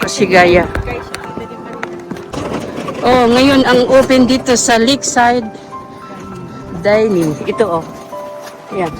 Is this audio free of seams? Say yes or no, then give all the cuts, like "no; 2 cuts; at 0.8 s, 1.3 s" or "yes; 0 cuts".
no; 1 cut; at 2.3 s